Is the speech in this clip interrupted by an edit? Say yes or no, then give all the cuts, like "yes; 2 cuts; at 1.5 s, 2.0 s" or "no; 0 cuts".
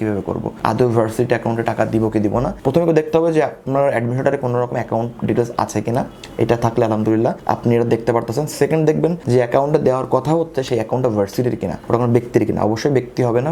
no; 0 cuts